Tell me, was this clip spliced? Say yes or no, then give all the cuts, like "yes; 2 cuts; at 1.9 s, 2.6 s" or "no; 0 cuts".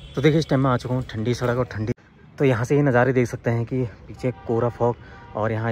yes; 1 cut; at 2.0 s